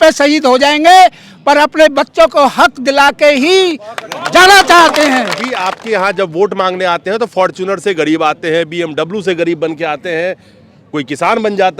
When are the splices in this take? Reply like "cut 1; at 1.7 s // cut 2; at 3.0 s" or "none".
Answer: cut 1; at 5.5 s